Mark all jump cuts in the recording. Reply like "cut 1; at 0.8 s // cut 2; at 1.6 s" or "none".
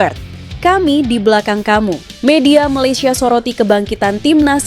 cut 1; at 2.1 s